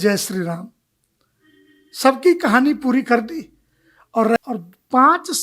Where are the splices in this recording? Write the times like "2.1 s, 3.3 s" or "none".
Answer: 4.4 s